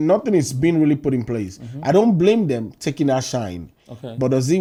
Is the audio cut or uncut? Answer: uncut